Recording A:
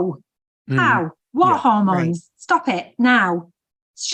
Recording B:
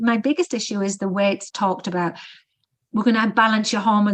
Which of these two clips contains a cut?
B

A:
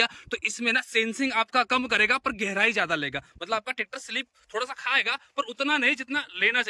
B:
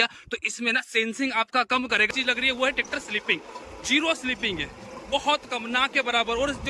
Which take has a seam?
B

